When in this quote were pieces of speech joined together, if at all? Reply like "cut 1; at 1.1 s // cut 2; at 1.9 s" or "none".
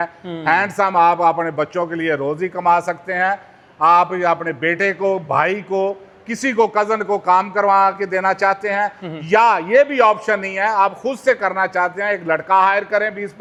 none